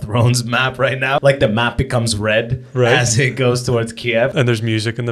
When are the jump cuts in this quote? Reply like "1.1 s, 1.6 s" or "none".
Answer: 1.2 s, 4.3 s